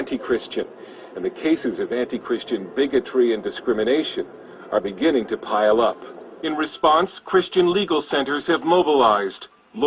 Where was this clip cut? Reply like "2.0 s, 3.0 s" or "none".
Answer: 8.7 s